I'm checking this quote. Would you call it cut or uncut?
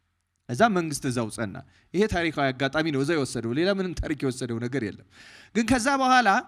uncut